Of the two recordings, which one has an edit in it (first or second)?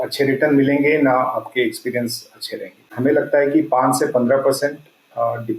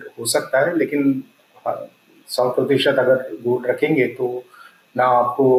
first